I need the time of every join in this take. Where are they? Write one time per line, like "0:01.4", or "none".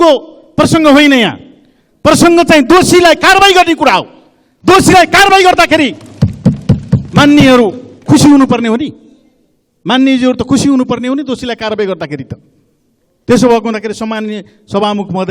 none